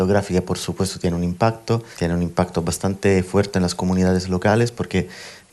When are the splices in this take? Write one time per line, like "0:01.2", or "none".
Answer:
0:01.9